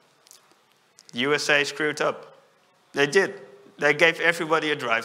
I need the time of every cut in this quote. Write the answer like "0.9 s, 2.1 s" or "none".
none